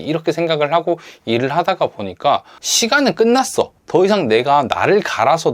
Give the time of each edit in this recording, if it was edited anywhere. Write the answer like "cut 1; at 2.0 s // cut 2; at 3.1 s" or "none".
cut 1; at 2.6 s // cut 2; at 3.8 s